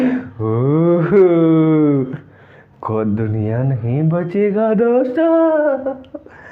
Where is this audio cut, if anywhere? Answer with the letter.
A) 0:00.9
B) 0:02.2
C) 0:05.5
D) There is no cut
D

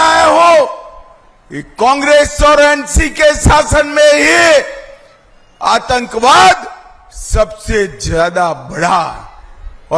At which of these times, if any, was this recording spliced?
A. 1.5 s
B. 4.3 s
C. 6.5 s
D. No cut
D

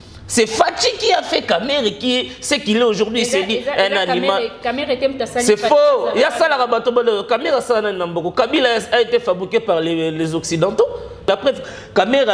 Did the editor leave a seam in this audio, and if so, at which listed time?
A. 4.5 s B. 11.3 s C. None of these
B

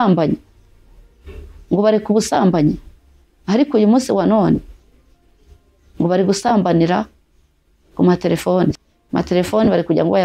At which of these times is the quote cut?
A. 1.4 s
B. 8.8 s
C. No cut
B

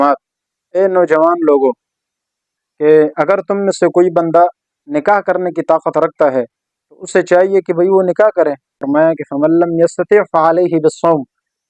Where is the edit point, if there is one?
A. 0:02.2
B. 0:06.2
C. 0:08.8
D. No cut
C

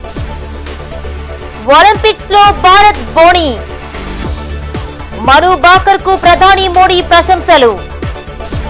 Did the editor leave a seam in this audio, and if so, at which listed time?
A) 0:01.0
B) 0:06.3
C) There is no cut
A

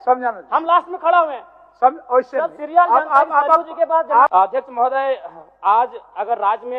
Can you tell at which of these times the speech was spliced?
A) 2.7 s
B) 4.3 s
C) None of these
B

